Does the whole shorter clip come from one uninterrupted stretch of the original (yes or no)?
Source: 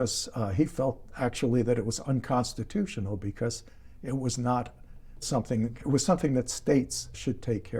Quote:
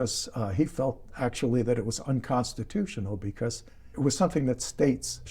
no